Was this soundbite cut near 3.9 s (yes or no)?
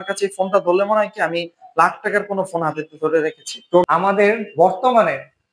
yes